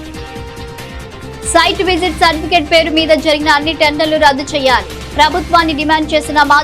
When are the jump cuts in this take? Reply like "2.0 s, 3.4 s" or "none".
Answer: 0.9 s